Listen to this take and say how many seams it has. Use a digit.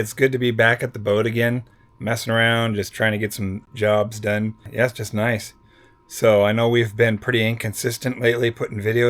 2